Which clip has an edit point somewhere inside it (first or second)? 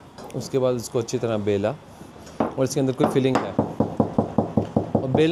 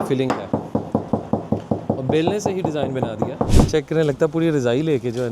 second